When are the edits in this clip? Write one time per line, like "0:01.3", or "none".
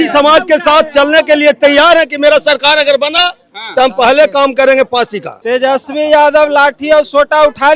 0:05.3

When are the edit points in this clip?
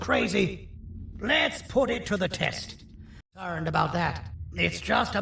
0:03.4

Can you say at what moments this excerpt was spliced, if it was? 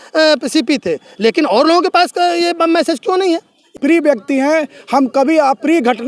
0:03.7

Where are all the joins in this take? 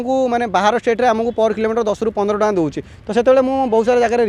none

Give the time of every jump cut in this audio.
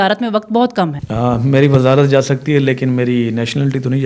0:01.0

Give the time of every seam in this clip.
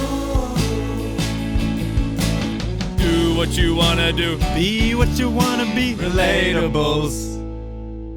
none

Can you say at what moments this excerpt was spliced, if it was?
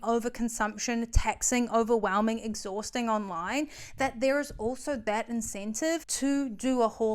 0:06.1

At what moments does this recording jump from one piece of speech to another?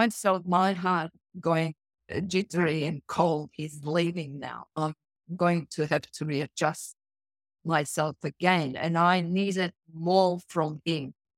none

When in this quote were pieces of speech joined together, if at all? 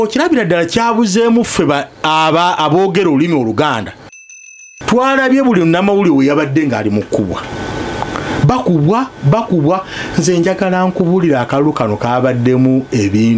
0:04.4

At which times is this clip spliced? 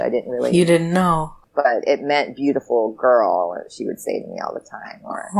0:01.3

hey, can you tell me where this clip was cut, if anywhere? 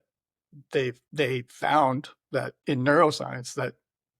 0:01.0
0:02.5

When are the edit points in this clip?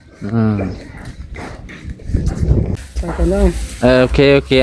0:02.7

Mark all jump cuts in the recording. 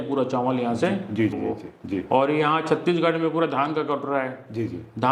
0:01.4

